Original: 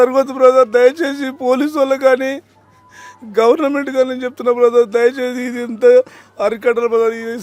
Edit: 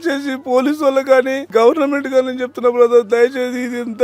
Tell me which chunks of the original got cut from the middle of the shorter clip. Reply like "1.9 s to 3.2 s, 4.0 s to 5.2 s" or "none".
2.3 s to 3.2 s